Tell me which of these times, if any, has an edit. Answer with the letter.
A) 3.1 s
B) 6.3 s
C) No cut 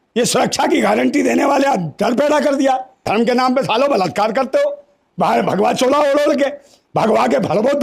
A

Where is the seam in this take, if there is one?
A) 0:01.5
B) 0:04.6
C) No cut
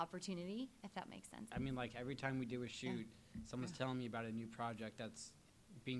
A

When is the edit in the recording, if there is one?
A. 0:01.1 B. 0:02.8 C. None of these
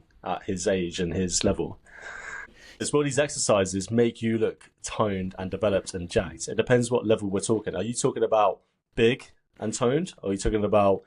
B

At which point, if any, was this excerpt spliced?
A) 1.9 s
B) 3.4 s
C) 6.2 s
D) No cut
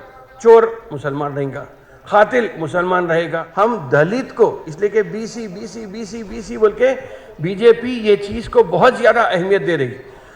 B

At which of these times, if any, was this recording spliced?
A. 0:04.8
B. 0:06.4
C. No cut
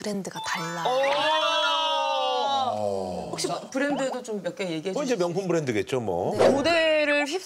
B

